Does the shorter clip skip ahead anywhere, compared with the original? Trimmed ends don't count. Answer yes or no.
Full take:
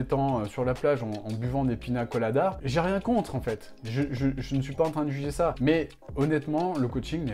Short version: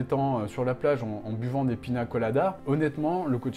yes